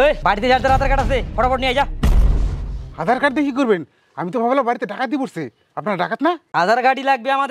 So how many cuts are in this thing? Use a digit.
0